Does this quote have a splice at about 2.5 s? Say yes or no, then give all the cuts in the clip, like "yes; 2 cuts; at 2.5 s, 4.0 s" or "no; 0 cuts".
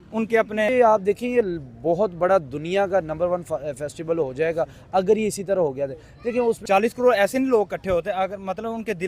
no; 2 cuts; at 0.7 s, 6.6 s